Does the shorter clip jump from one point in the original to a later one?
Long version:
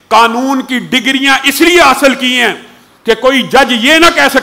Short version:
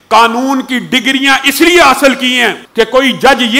yes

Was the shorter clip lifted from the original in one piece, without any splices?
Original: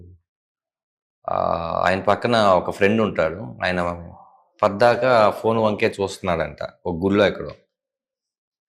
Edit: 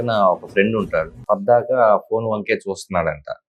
no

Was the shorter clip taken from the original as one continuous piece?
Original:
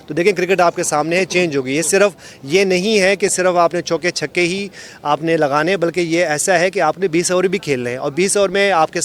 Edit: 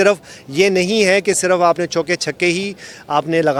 yes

